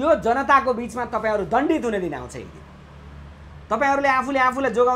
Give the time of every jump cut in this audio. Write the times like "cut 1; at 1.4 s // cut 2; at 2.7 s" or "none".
none